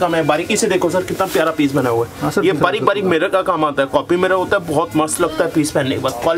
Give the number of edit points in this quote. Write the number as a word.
zero